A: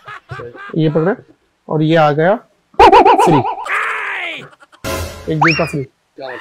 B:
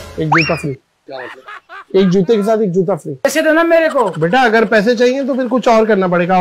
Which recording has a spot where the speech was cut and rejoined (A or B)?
B